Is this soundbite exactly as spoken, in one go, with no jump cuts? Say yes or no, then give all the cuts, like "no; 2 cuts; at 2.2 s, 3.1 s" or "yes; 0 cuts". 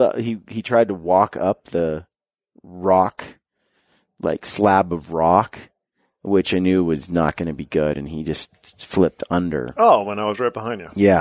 yes; 0 cuts